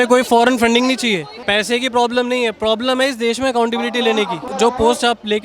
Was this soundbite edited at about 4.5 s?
yes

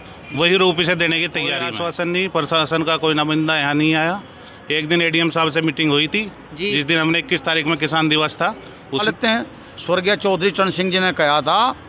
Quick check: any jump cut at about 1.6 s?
yes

